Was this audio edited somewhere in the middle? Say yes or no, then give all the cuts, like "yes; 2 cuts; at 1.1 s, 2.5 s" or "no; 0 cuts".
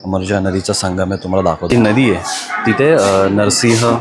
no; 0 cuts